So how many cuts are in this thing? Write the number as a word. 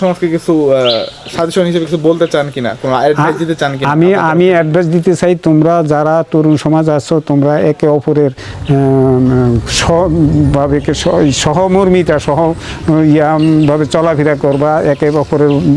zero